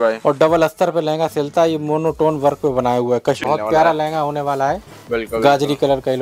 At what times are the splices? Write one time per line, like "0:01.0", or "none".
0:03.4